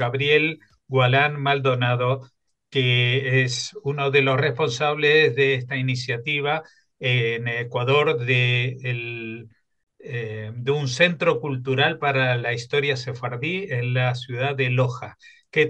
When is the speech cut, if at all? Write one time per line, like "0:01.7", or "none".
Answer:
none